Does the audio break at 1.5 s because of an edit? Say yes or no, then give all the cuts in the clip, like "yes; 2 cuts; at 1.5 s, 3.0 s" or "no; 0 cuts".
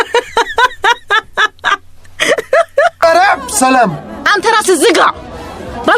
no; 1 cut; at 3.0 s